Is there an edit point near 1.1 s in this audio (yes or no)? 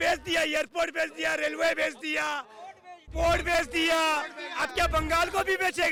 no